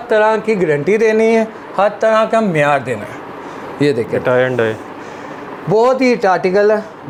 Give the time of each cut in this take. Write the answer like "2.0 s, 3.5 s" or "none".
none